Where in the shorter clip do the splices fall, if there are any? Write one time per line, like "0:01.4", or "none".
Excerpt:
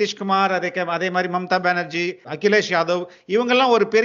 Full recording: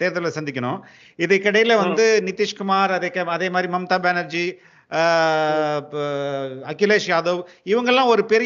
0:02.2